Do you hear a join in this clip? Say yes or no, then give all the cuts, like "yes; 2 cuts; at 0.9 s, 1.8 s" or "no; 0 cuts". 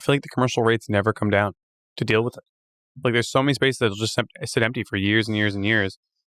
no; 0 cuts